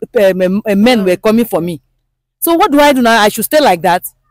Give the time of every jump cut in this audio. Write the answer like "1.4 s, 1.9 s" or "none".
none